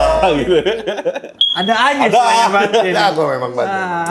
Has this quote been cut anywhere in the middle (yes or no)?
no